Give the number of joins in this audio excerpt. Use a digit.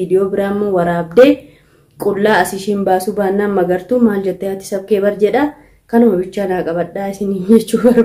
0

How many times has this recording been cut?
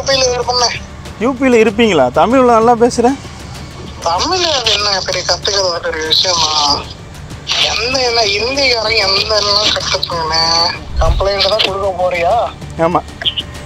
1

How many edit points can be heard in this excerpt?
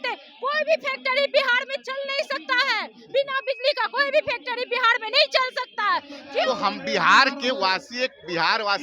1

